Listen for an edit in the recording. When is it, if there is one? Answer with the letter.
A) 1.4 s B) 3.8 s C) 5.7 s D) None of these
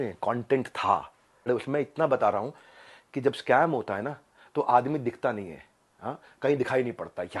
A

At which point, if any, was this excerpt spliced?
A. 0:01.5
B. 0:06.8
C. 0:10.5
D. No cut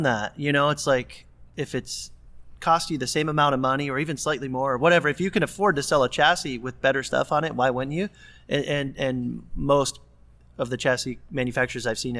A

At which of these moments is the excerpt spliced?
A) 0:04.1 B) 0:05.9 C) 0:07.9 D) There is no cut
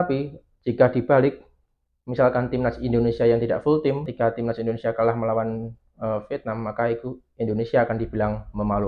A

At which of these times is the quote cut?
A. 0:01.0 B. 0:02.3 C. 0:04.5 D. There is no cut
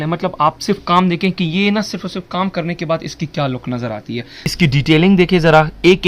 C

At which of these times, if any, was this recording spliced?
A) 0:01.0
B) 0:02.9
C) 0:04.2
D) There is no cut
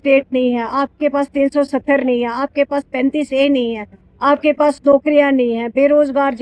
D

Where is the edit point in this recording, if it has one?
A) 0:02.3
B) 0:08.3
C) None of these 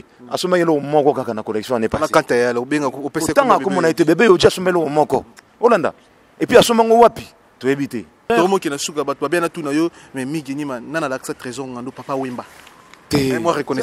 B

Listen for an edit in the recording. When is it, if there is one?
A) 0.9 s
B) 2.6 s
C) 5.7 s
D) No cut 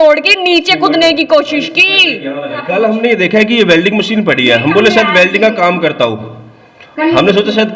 B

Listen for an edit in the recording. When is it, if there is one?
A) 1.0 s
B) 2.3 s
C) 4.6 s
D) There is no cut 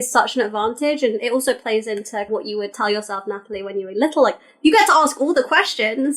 B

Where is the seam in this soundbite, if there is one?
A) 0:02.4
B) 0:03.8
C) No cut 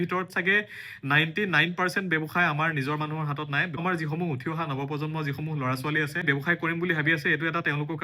B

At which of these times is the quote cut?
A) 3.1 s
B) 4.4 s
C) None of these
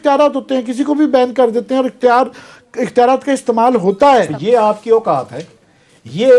B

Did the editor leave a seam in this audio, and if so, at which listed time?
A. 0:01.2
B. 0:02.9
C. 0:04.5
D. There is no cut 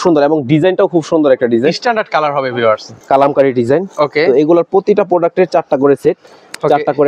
B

